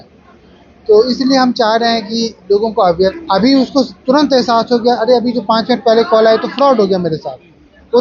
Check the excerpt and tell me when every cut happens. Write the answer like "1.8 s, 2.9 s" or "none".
3.2 s